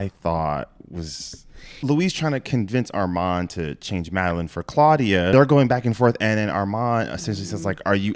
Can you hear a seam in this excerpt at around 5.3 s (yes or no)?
yes